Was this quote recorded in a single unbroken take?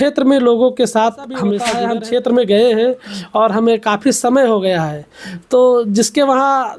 no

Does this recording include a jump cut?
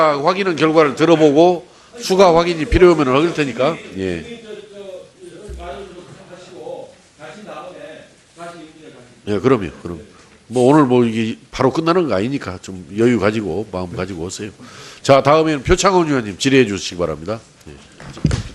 yes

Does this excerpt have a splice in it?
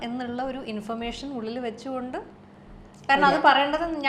no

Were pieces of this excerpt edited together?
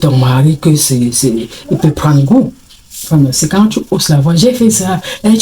yes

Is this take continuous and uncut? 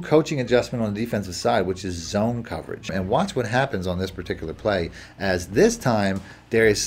no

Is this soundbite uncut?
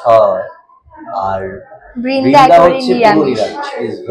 yes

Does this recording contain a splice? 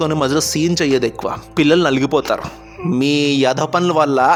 no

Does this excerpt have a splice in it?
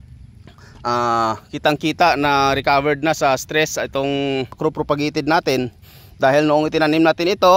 yes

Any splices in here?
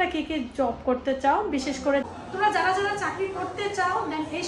yes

